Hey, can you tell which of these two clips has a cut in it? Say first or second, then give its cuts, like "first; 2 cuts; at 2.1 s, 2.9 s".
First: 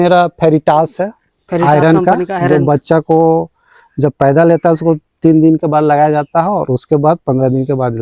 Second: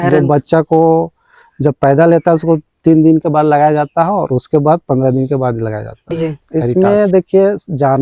second; 1 cut; at 6.7 s